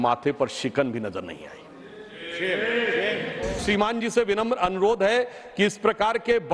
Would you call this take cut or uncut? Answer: cut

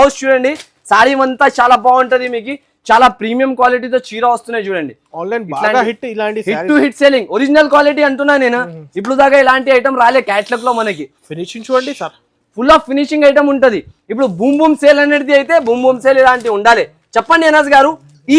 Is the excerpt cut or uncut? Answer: uncut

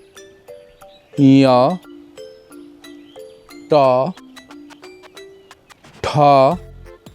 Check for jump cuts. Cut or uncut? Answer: cut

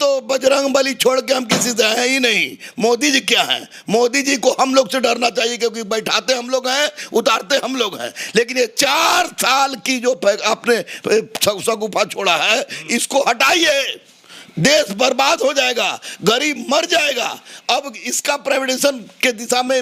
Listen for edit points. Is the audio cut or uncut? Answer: uncut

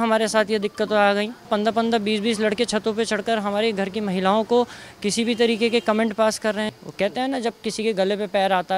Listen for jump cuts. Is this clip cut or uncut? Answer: cut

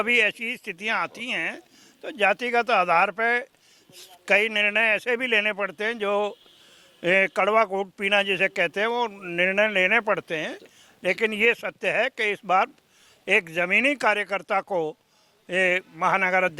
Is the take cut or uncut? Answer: uncut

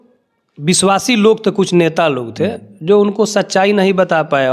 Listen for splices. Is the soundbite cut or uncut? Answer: uncut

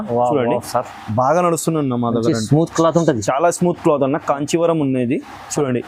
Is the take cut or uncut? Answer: uncut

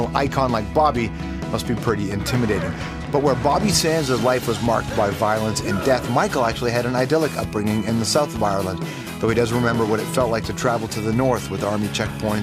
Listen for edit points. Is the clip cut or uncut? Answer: cut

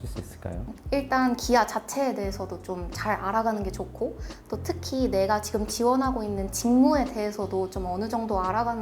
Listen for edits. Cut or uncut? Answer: uncut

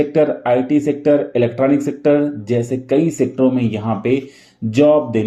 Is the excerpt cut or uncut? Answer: uncut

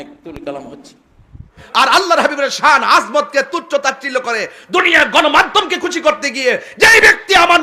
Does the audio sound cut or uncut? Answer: cut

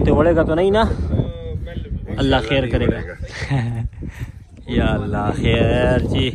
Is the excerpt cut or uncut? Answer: uncut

